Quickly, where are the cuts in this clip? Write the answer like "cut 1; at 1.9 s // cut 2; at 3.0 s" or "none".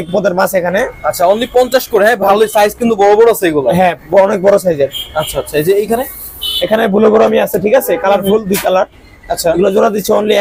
none